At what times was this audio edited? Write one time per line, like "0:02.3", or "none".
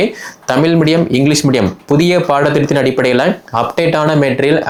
none